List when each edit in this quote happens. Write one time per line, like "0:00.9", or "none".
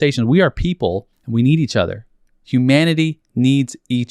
0:01.2